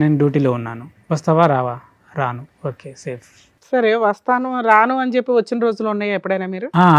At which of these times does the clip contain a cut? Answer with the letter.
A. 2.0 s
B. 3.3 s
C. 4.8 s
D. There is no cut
D